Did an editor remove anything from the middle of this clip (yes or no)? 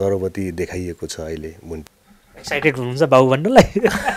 yes